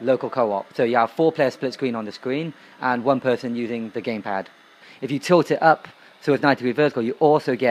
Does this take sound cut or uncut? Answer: cut